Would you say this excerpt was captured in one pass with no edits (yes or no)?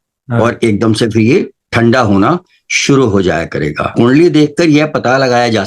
no